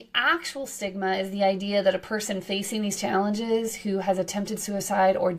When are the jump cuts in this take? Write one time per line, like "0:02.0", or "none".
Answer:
none